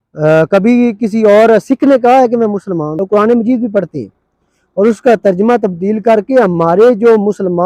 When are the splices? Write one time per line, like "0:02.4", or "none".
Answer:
0:02.9